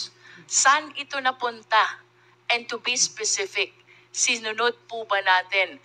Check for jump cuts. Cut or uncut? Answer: uncut